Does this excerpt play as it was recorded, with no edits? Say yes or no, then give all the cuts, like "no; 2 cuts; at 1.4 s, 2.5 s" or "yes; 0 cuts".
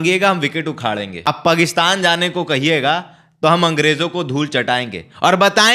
no; 1 cut; at 1.3 s